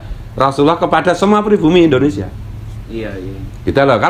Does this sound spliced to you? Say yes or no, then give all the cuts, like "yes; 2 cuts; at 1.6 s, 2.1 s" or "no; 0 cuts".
yes; 1 cut; at 1.0 s